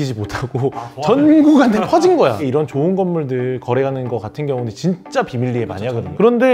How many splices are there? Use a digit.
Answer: 1